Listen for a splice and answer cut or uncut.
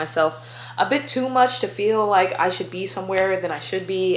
uncut